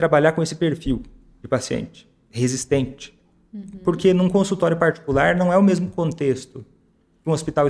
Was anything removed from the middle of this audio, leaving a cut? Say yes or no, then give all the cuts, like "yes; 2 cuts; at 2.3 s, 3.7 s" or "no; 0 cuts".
no; 0 cuts